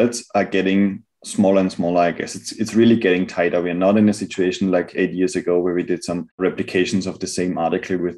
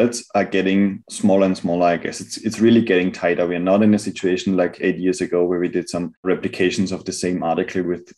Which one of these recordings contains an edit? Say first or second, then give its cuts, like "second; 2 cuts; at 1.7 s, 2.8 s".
second; 1 cut; at 1.1 s